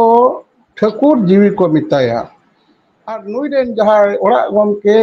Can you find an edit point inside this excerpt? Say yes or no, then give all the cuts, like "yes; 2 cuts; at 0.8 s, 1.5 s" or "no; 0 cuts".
yes; 1 cut; at 3.2 s